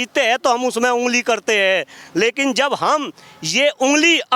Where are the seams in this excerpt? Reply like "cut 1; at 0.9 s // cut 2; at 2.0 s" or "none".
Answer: none